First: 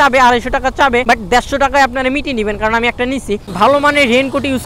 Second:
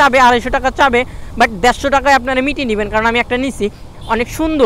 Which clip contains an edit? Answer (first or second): first